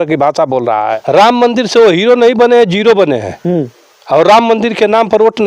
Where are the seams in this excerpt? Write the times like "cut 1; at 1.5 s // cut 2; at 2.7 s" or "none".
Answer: cut 1; at 1.0 s